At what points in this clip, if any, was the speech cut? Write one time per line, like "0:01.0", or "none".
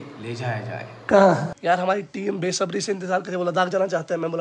0:01.5

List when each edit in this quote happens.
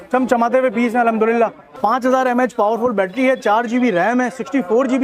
0:01.6

